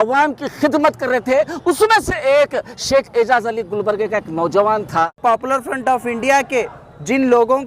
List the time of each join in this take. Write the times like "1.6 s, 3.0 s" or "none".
5.2 s